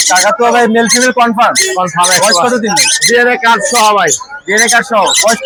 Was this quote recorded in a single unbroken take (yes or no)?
yes